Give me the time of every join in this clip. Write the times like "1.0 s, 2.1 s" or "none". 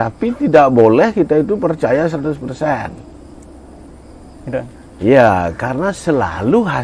none